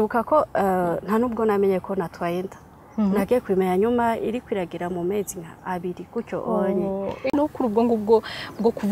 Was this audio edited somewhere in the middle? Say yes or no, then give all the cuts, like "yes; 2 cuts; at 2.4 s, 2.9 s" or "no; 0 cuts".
yes; 1 cut; at 7.3 s